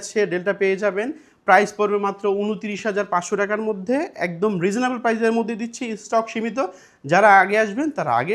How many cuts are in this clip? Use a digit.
0